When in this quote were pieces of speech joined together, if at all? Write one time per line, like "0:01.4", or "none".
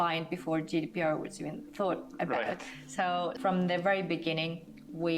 0:03.4